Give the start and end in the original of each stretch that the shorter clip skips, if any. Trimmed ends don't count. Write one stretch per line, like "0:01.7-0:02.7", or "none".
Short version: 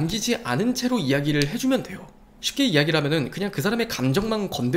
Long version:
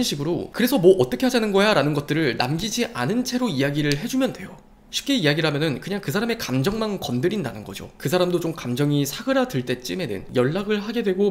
none